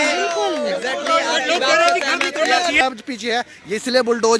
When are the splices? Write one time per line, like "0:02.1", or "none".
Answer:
0:02.8